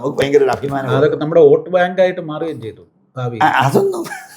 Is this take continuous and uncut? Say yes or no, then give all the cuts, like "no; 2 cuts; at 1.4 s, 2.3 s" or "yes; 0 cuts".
yes; 0 cuts